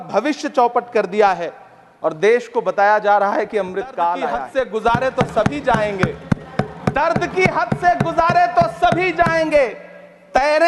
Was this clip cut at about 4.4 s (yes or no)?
yes